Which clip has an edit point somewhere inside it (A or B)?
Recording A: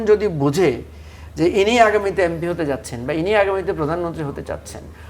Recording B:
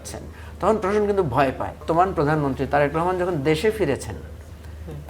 B